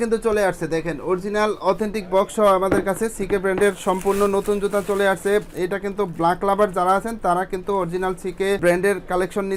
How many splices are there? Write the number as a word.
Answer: zero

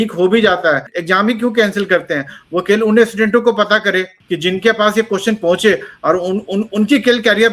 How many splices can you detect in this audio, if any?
two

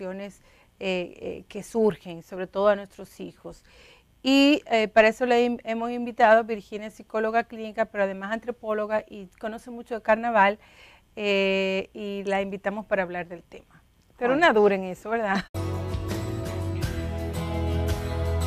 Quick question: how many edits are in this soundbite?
zero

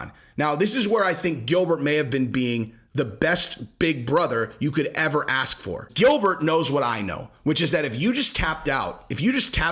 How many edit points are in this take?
one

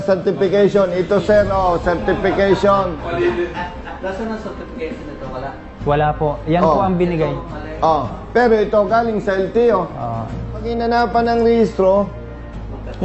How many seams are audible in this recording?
one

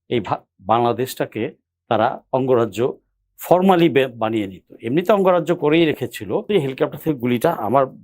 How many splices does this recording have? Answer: one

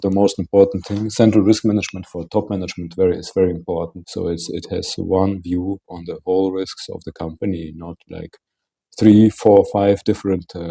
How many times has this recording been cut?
two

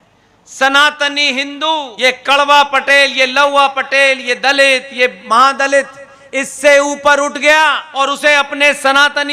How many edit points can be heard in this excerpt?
two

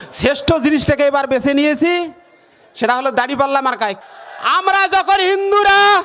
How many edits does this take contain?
one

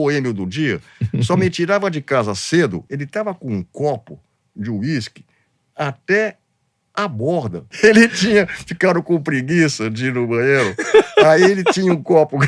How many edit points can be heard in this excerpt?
two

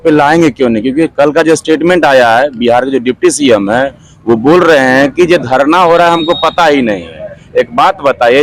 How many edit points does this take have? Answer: zero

